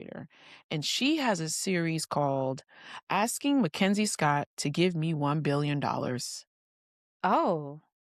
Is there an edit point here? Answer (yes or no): no